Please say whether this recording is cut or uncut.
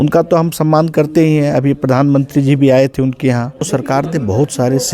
cut